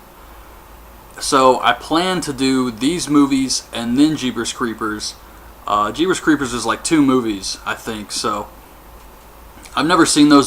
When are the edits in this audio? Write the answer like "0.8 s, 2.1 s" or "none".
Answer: none